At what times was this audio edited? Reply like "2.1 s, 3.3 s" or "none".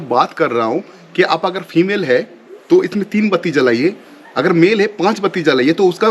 none

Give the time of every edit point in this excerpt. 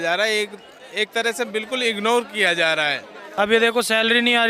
3.2 s

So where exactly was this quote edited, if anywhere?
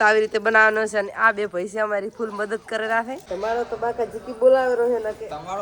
3.2 s

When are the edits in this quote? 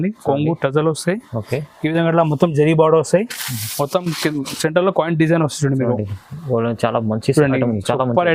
none

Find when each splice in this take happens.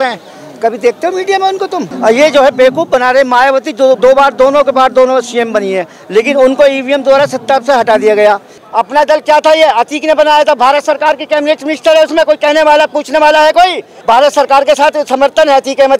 1.9 s, 8.6 s, 13.9 s

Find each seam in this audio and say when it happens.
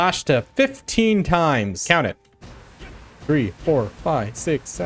1.8 s

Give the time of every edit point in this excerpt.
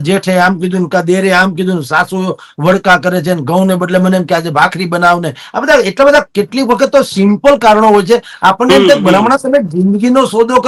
none

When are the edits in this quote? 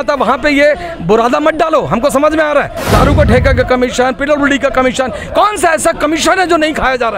2.9 s

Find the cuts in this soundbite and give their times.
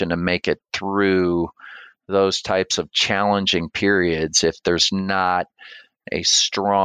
none

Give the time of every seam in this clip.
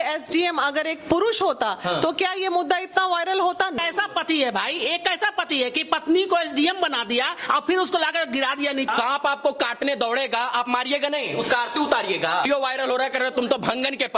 3.8 s, 8.9 s, 12.4 s

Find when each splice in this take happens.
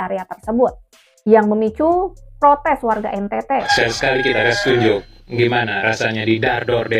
3.7 s

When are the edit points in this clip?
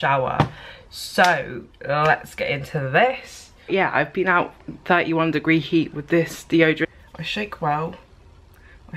3.6 s, 6.9 s

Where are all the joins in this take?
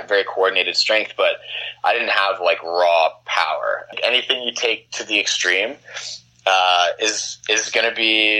4.0 s

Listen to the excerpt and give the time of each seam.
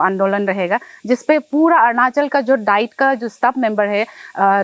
none

